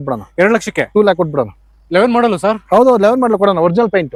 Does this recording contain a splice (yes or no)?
no